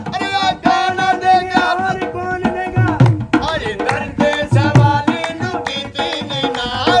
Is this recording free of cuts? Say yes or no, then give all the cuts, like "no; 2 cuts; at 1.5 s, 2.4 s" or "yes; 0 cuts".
yes; 0 cuts